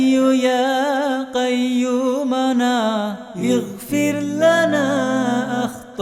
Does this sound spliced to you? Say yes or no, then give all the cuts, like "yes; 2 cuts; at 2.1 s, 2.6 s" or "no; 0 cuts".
no; 0 cuts